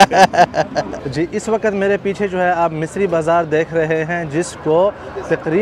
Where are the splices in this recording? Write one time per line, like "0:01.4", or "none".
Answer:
0:01.0

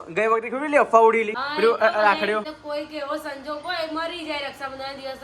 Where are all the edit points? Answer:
0:01.4
0:02.5

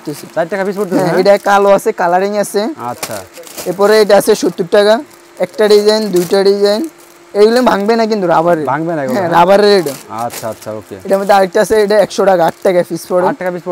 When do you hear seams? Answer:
none

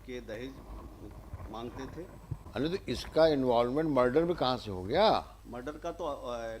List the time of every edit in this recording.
0:02.4
0:05.4

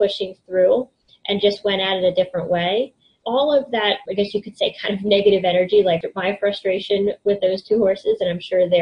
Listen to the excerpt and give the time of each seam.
0:03.2
0:04.0
0:06.0

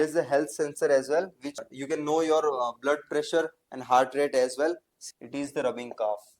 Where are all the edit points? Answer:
0:01.6
0:04.9

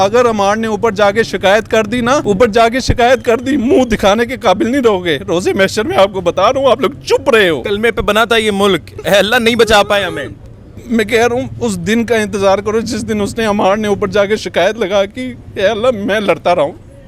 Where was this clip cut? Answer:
0:02.2
0:07.6

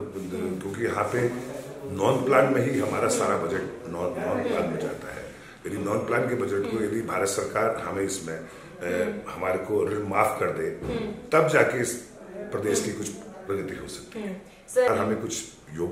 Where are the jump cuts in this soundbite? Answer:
0:14.9

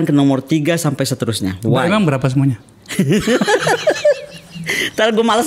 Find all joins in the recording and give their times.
none

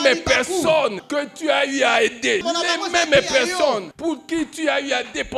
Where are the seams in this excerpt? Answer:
0:01.0
0:02.4
0:03.9

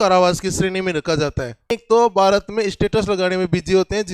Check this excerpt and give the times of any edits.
0:01.7

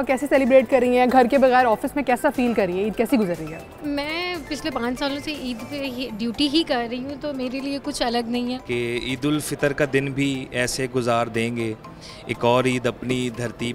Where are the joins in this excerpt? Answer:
0:08.6

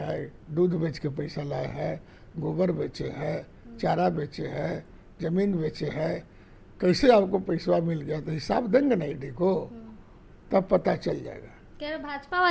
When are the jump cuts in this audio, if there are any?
none

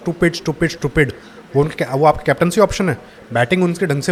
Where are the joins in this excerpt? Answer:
none

